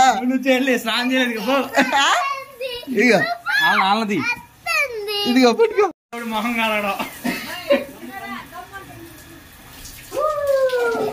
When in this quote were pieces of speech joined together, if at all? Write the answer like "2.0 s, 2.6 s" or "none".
6.1 s